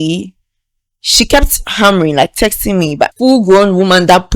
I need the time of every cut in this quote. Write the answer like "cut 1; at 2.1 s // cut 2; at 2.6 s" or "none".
cut 1; at 3.1 s